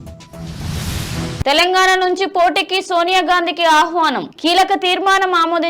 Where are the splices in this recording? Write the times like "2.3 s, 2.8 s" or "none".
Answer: 1.2 s

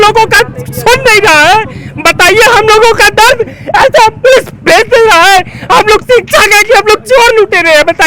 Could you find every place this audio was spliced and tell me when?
none

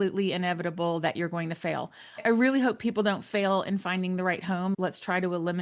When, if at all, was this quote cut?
2.2 s, 4.8 s

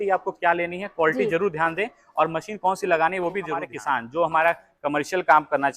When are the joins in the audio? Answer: 3.6 s

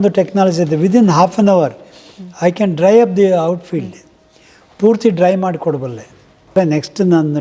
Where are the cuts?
6.5 s

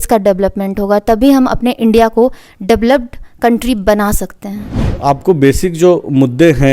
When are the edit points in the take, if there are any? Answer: 4.9 s

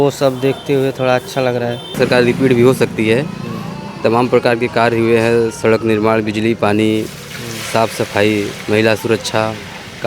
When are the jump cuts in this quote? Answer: 1.9 s

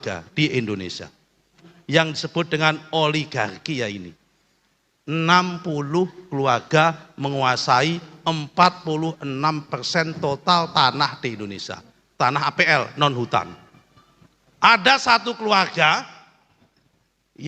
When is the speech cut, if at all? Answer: 1.7 s

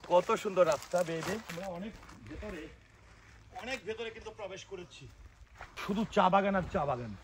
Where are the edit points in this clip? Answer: 1.5 s, 5.8 s

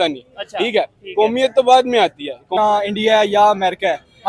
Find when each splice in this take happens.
2.5 s

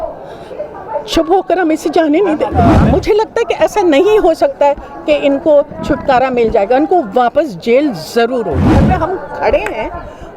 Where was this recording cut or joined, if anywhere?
2.8 s, 8.8 s

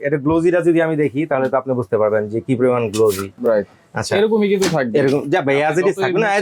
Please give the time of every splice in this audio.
none

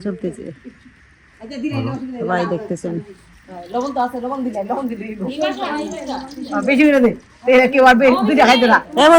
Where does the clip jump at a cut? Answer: none

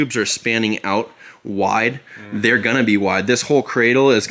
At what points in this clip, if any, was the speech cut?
none

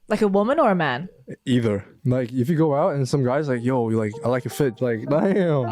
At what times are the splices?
1.9 s, 4.7 s

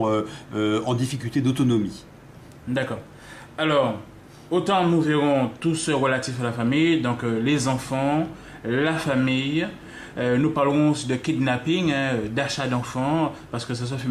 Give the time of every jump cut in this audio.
none

